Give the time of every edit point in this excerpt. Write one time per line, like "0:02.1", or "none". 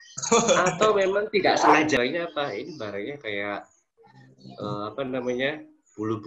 0:02.0